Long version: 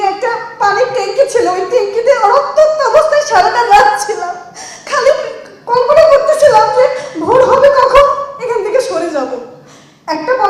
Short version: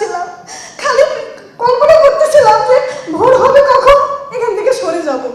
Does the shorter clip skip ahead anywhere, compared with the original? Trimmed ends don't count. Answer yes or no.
no